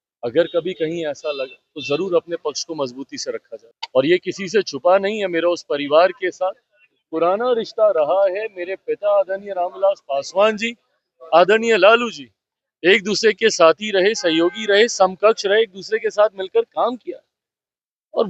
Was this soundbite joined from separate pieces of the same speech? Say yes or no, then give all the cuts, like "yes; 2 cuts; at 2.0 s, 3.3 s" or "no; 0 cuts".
yes; 1 cut; at 3.5 s